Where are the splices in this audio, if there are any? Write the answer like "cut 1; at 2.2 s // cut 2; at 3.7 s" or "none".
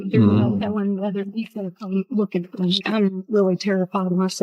cut 1; at 2.8 s